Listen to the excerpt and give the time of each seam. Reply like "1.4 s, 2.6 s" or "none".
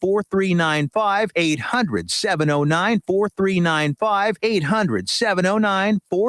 1.3 s, 4.3 s